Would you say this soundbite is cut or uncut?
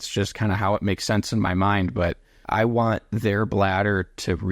cut